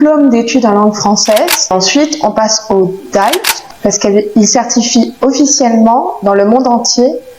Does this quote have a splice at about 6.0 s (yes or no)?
no